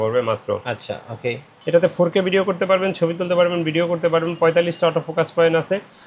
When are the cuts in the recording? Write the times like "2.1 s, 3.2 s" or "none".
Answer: 1.5 s